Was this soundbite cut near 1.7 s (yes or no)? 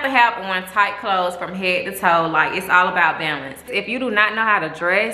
no